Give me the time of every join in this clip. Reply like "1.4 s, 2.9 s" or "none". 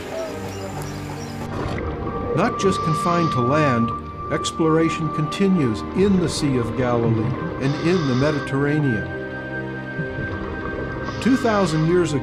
none